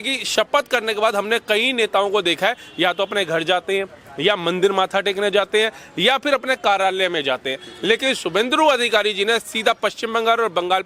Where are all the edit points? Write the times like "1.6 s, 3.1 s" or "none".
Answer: none